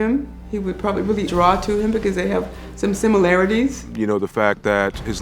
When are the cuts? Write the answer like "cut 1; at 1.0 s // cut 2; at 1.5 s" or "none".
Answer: cut 1; at 1.3 s // cut 2; at 3.9 s